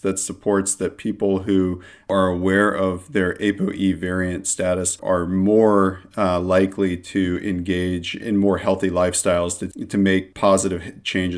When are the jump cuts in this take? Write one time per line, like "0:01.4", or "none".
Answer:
0:09.7